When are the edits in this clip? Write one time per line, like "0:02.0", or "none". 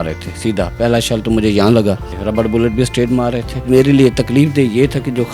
0:02.1
0:03.7